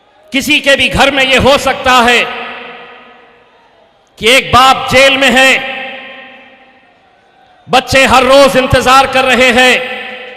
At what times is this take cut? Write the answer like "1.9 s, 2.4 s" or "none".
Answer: none